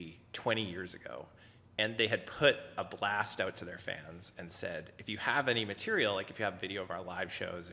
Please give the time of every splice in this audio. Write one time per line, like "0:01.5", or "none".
none